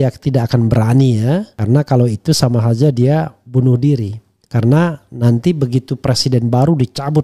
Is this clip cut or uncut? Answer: uncut